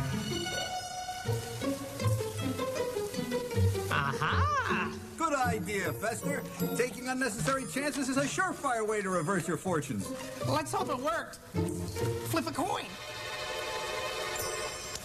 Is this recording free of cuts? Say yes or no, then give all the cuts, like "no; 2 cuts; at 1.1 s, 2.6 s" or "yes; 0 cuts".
yes; 0 cuts